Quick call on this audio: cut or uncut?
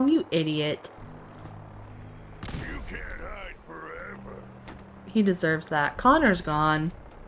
uncut